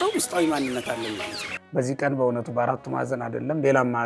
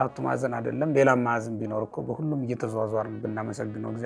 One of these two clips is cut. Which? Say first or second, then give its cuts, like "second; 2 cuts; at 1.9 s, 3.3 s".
first; 1 cut; at 1.6 s